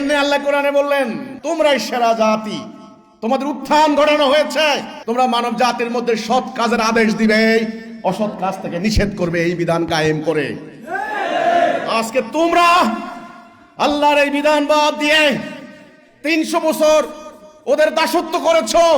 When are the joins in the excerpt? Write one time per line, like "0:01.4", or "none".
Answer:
0:01.3
0:04.9